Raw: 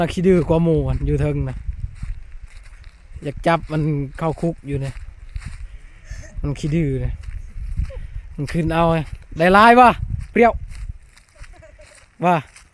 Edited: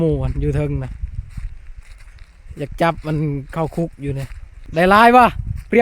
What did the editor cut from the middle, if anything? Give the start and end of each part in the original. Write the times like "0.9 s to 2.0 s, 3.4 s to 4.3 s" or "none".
5.2 s to 9.2 s